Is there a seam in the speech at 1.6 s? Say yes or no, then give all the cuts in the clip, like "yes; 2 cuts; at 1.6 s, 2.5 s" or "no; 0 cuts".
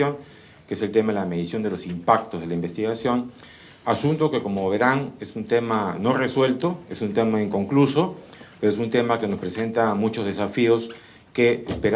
yes; 1 cut; at 1.6 s